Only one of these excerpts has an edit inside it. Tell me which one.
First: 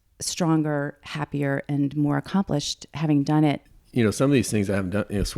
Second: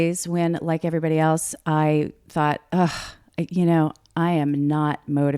first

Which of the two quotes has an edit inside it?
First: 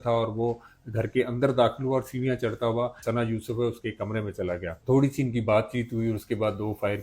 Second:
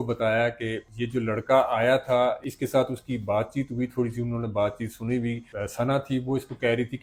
first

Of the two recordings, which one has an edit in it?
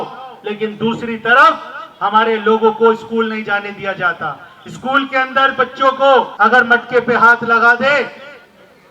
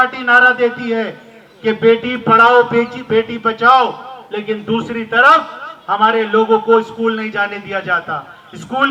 first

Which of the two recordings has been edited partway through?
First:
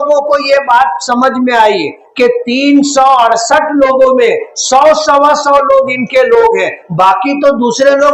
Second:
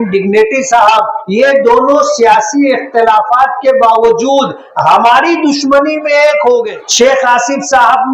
second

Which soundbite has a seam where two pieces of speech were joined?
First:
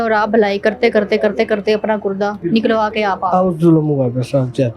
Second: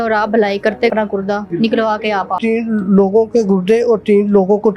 second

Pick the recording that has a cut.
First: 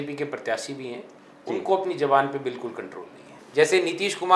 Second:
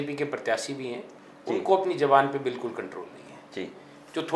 first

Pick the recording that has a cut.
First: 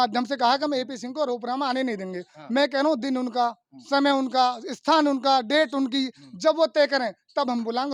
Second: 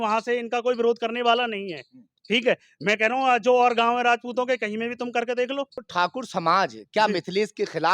second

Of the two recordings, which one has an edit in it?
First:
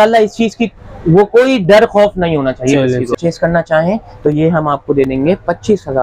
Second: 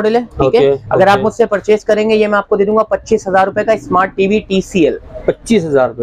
first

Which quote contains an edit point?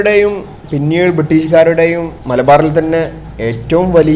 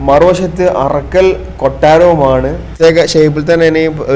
second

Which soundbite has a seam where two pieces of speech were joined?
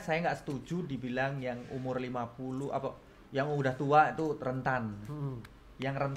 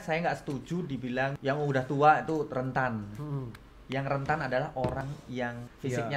second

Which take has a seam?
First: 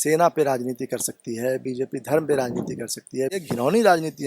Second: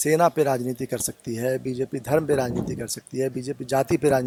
first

